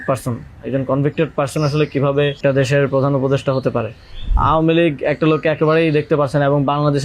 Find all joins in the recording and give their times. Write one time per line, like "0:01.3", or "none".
0:02.4
0:04.3

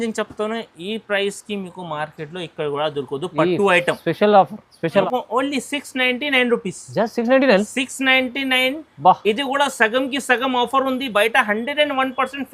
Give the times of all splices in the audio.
0:05.1

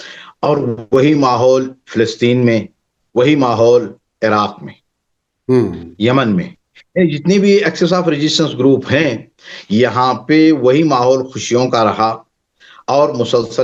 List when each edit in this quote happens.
none

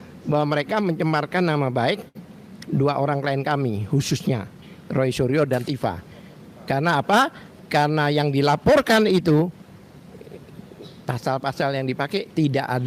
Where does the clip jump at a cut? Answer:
none

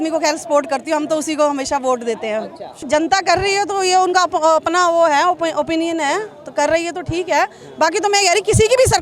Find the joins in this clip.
none

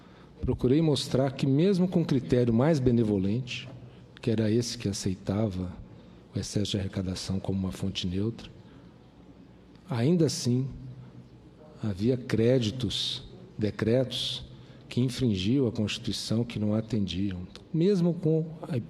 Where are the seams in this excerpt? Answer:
0:10.2

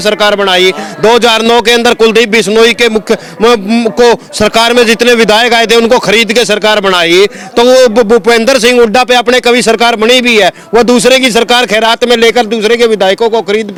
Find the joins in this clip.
none

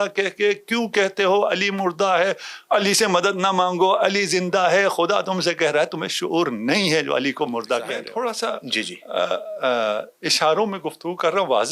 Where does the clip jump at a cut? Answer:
0:08.1

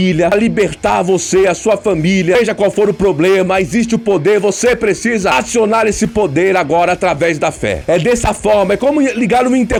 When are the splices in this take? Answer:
none

